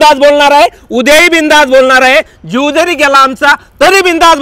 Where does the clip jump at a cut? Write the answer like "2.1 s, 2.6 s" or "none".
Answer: none